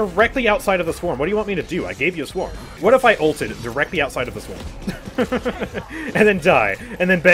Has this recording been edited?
yes; 1 cut; at 2.6 s

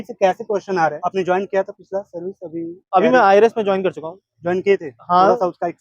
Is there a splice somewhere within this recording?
yes; 1 cut; at 1.0 s

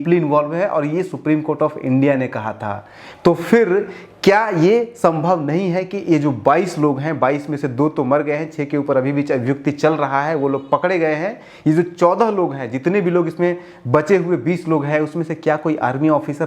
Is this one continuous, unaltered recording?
yes; 0 cuts

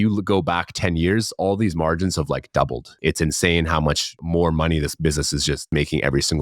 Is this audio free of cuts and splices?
no; 3 cuts; at 2.9 s, 4.1 s, 5.7 s

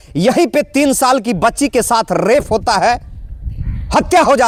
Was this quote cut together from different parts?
no; 0 cuts

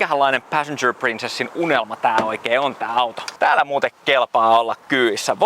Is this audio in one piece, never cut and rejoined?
no; 1 cut; at 3.2 s

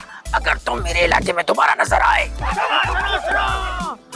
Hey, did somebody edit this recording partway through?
yes; 1 cut; at 2.4 s

